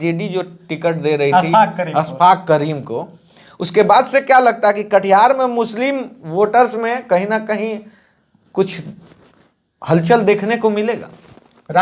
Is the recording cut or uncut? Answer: uncut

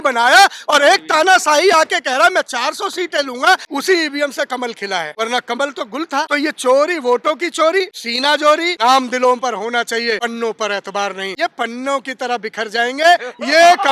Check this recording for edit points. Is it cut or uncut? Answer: cut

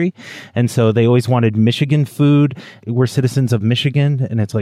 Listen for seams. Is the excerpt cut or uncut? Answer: cut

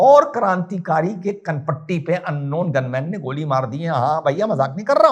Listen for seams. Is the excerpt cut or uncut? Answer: uncut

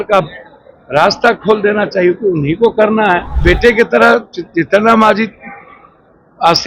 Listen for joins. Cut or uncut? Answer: cut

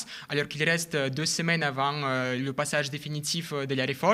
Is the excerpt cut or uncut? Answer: uncut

